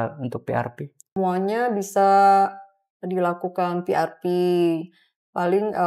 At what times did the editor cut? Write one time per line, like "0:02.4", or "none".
0:01.1